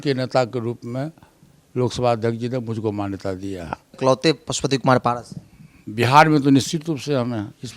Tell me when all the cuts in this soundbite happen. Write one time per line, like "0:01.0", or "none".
0:04.0

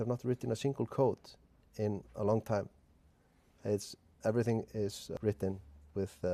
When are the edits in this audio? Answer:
0:01.5
0:05.2

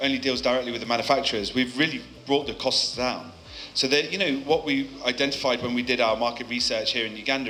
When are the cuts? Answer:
none

